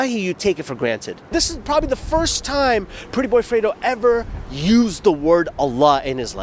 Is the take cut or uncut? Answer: cut